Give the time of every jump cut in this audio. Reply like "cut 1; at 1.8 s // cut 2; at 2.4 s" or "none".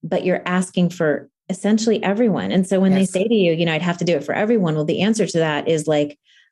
none